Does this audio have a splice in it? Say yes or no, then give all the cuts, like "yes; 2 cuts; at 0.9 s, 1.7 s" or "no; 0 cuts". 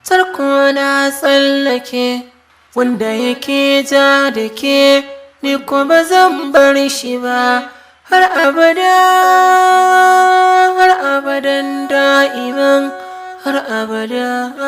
yes; 1 cut; at 13.6 s